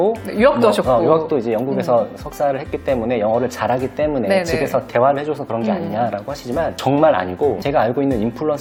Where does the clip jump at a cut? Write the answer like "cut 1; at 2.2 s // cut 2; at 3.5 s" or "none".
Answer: none